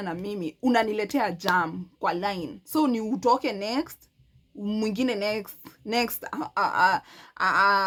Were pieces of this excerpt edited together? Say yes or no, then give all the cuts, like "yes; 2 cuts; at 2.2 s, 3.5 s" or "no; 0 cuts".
no; 0 cuts